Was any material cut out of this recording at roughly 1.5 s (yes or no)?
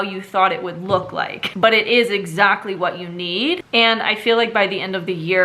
yes